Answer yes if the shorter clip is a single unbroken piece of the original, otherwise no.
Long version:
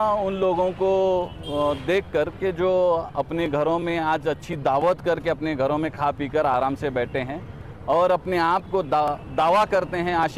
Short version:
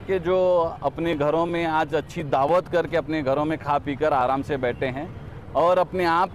yes